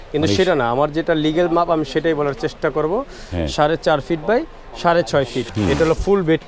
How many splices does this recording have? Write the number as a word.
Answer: one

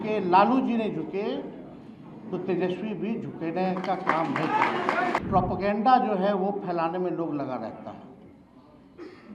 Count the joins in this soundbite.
one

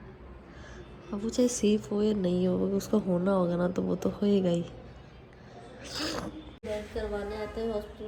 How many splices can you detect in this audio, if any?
one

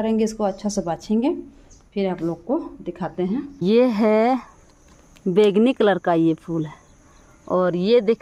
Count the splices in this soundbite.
one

